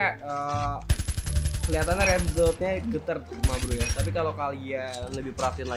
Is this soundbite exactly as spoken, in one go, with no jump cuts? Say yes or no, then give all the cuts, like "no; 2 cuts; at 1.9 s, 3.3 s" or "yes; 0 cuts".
yes; 0 cuts